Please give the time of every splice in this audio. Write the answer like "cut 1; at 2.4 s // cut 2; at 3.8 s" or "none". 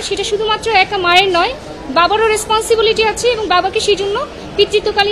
none